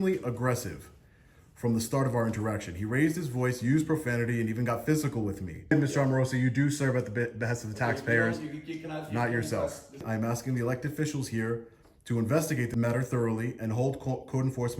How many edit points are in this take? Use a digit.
3